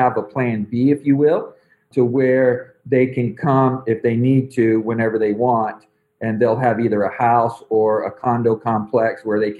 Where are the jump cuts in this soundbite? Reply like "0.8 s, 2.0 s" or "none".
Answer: none